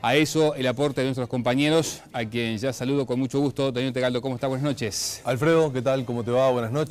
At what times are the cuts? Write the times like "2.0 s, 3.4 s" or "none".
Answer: 1.3 s